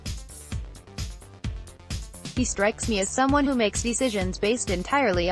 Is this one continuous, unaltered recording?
no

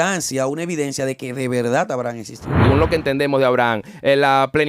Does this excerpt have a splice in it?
yes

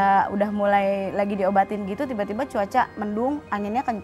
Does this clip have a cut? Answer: no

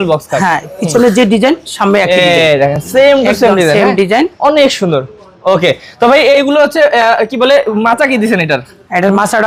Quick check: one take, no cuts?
yes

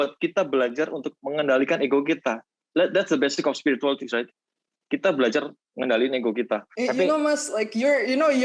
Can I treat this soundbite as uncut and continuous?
no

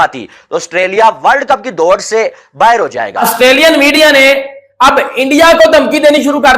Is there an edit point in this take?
yes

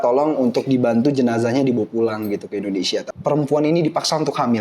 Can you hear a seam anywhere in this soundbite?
yes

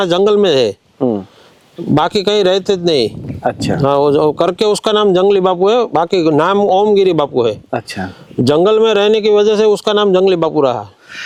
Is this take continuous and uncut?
yes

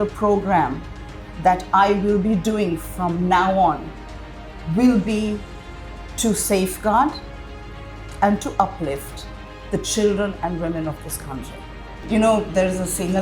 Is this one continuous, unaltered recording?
no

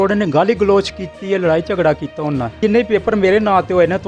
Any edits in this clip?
yes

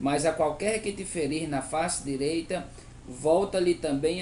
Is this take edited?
no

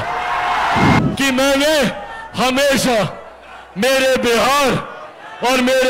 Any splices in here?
yes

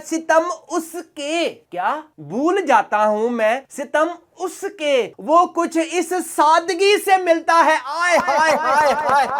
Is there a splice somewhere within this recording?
no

